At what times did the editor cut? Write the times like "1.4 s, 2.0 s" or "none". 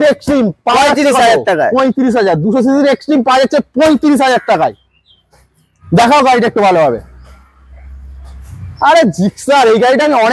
none